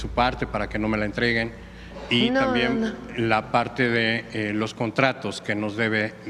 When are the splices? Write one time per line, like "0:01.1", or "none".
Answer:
none